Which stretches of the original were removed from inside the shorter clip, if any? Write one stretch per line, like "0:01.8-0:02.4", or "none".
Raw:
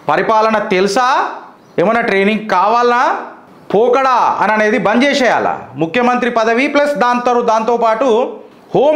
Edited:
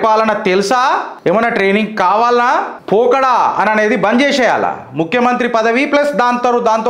0:01.3-0:01.6
0:03.3-0:03.6